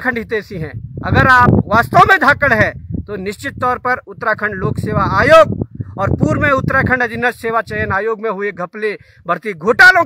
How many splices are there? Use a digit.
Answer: 0